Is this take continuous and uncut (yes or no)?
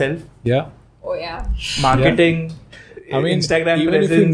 yes